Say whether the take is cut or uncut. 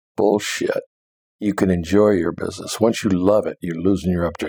uncut